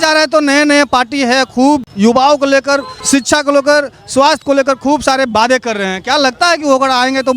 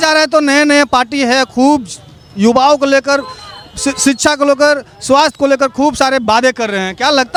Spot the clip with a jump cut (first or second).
first